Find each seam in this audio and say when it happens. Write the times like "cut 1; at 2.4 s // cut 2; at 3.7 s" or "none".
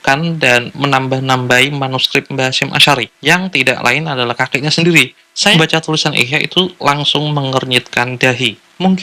cut 1; at 5.5 s